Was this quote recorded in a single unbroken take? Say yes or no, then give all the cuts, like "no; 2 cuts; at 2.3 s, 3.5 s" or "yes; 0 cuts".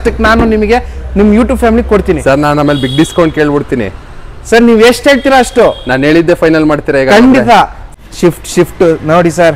no; 1 cut; at 7.8 s